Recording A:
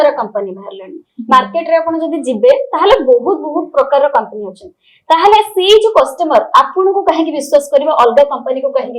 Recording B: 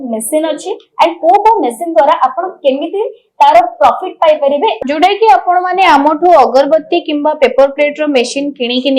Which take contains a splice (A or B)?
B